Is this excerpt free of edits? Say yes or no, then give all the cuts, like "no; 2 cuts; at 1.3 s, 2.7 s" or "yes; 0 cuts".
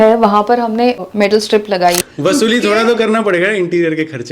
no; 2 cuts; at 1.0 s, 2.1 s